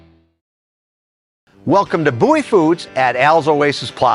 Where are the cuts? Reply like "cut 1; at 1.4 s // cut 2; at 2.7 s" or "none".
cut 1; at 1.0 s